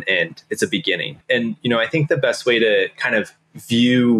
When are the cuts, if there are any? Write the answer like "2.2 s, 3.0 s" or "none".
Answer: 1.2 s